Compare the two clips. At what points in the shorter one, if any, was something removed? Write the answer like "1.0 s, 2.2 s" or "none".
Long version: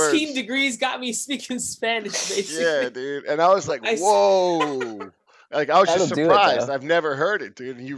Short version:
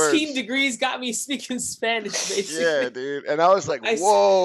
none